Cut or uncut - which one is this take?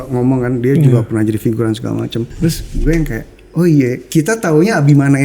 cut